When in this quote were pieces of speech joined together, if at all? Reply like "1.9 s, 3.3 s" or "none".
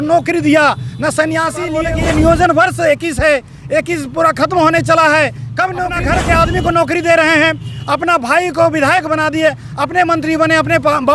1.8 s, 5.9 s